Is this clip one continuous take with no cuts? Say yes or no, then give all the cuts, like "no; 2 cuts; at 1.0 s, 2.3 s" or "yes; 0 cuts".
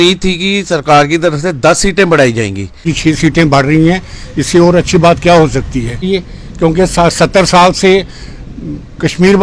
no; 2 cuts; at 2.9 s, 6.1 s